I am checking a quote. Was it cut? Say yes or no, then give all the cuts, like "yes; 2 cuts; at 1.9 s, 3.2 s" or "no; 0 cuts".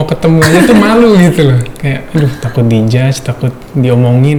no; 0 cuts